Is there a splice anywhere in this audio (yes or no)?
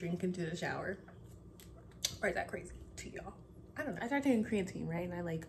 yes